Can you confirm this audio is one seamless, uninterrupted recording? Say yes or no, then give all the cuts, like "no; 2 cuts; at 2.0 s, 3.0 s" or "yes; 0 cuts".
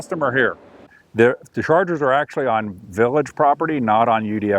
no; 1 cut; at 0.9 s